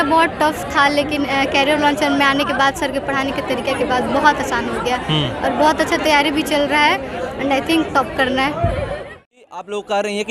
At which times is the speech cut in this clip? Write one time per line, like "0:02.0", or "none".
0:09.1